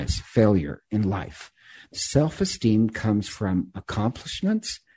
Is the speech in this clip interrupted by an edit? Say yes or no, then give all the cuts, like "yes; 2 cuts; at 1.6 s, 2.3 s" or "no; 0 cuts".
yes; 1 cut; at 1.9 s